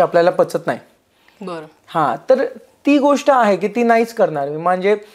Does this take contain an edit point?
no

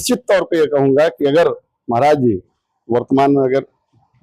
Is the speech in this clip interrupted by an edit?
no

